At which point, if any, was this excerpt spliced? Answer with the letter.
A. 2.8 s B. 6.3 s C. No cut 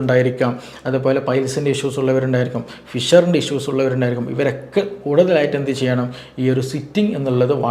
C